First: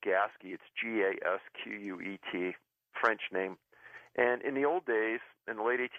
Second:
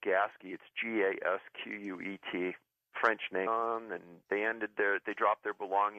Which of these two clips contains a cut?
first; 1 cut; at 3.5 s

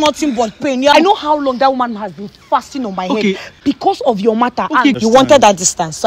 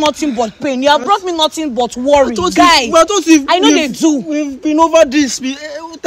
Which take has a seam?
first; 3 cuts; at 0.9 s, 3.5 s, 5.0 s

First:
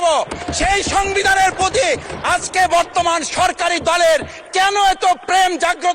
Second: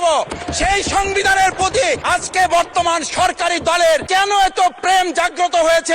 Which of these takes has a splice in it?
second; 2 cuts; at 2.0 s, 4.0 s

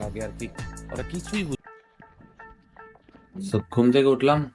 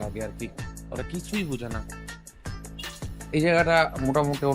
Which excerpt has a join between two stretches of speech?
first; 1 cut; at 1.6 s

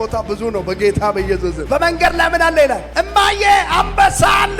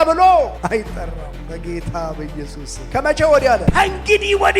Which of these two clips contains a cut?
second; 1 cut; at 3.6 s

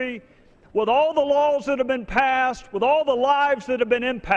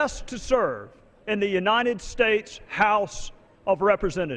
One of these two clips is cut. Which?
first; 1 cut; at 1.4 s

